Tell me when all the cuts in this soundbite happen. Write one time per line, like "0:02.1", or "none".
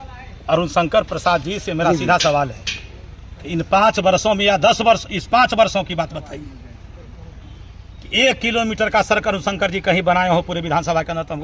none